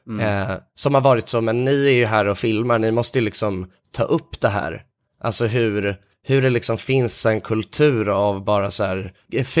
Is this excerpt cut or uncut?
cut